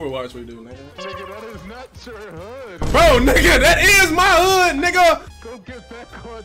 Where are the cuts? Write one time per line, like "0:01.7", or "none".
0:00.9
0:05.4